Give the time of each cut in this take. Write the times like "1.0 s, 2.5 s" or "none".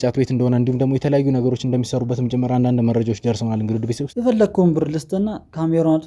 4.0 s